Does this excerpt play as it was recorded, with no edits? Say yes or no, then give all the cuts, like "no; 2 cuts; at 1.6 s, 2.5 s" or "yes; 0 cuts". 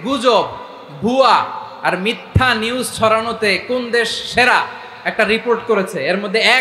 yes; 0 cuts